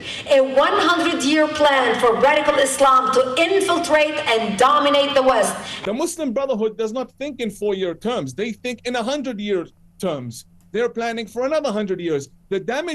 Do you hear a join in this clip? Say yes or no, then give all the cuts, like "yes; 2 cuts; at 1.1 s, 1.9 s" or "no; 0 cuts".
yes; 1 cut; at 5.7 s